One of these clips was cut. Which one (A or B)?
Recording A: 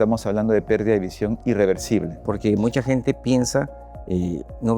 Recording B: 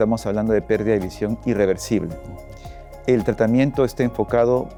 A